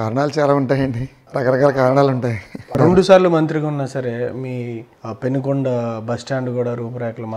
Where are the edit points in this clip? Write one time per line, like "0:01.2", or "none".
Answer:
0:02.7